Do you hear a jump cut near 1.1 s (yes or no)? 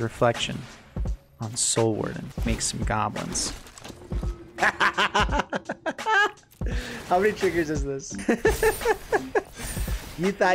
no